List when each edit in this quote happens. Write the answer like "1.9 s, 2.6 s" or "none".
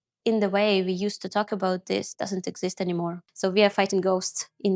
3.2 s